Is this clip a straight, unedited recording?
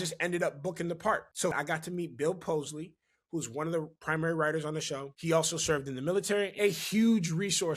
no; 3 cuts; at 1.5 s, 5.1 s, 6.5 s

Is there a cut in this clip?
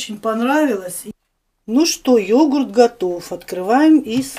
yes; 1 cut; at 1.0 s

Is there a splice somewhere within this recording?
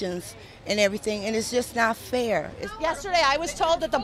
yes; 1 cut; at 2.6 s

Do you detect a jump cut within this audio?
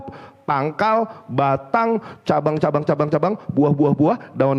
no; 0 cuts

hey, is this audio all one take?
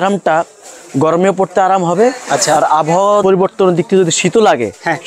yes; 0 cuts

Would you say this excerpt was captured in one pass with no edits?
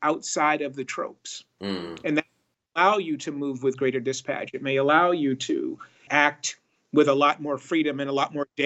no; 1 cut; at 6.1 s

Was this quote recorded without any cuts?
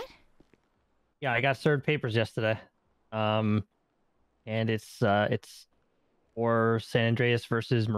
yes; 0 cuts

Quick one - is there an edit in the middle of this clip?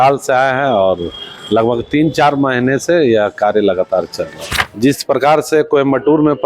yes; 1 cut; at 4.5 s

